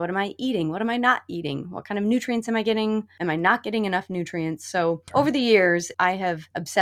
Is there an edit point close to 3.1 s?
yes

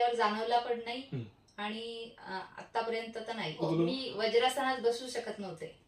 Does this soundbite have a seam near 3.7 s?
yes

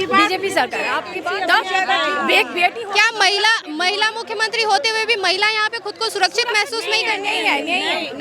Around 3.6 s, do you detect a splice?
no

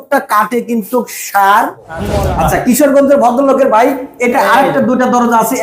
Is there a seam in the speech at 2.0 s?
yes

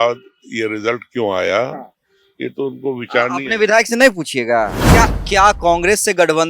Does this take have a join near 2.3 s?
no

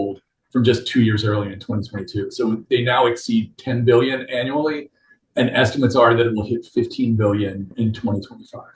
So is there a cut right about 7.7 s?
yes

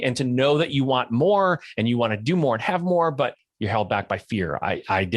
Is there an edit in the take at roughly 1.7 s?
no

